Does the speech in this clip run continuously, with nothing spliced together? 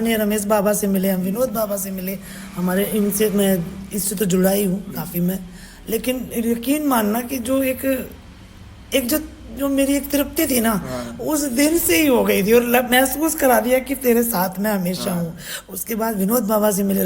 yes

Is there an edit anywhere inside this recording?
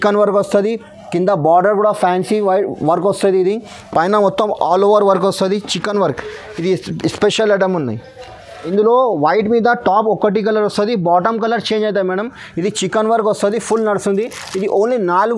no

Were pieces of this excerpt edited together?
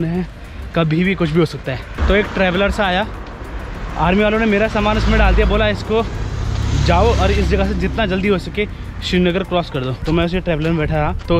no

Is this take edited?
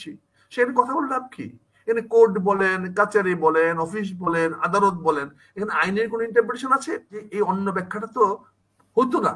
yes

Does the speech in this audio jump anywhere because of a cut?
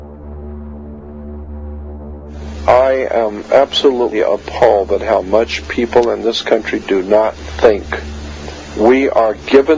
yes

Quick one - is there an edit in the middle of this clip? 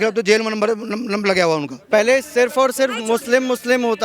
yes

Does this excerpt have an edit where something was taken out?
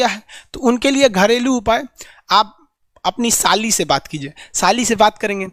no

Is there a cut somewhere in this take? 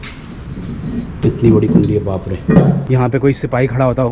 yes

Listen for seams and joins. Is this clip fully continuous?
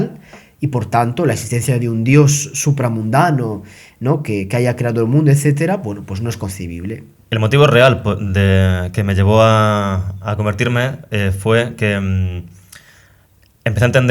no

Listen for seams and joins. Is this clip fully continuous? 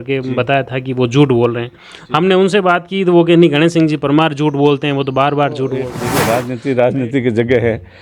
no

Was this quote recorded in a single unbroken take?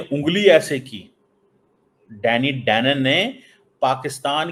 yes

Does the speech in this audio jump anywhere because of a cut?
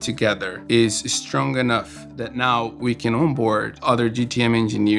yes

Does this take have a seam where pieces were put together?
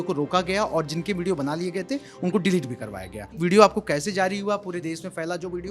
yes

